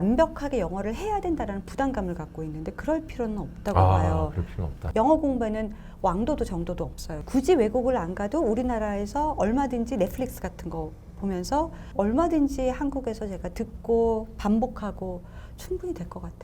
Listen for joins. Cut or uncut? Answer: cut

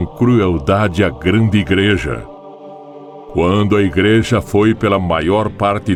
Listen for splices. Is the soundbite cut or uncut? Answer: uncut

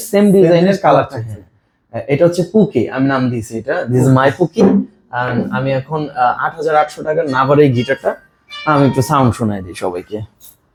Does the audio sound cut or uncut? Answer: uncut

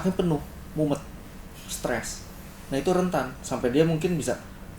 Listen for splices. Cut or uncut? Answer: uncut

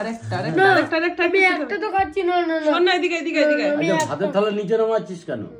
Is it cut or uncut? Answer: uncut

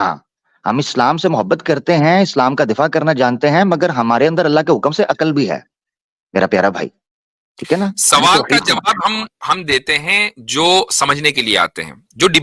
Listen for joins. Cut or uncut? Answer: uncut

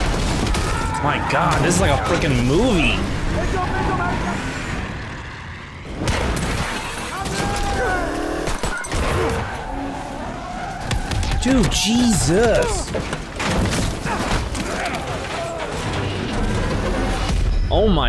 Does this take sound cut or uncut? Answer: uncut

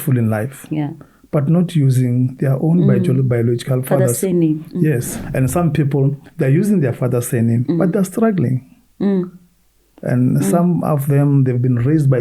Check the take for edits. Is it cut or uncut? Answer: cut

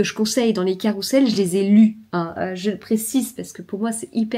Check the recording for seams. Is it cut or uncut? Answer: uncut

